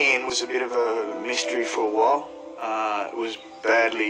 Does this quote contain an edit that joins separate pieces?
no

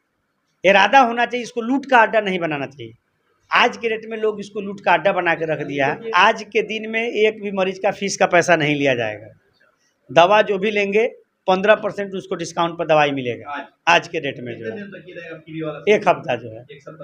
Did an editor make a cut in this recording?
no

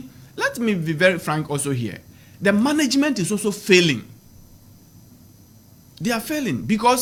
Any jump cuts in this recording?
no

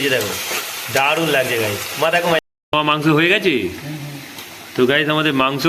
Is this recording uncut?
no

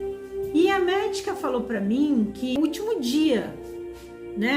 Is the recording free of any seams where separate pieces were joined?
no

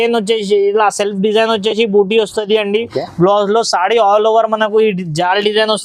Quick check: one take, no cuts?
yes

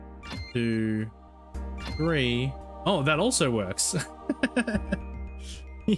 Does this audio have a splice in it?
no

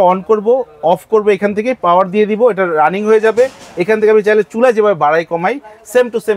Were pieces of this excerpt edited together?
no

